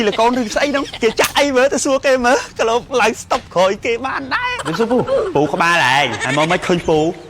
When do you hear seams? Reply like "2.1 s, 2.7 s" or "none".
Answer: 0.9 s, 2.9 s, 4.6 s, 6.2 s

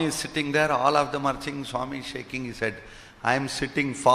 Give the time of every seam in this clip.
none

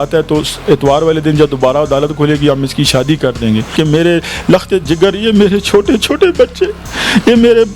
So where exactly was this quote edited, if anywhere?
3.7 s

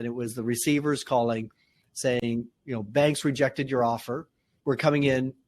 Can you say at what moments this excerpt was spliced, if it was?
4.5 s

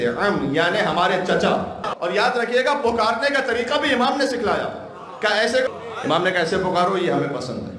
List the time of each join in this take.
1.8 s, 5.7 s

